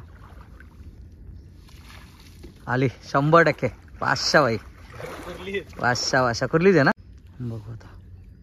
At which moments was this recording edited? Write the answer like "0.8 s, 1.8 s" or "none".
6.9 s